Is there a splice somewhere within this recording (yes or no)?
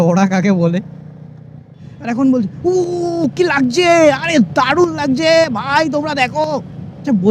yes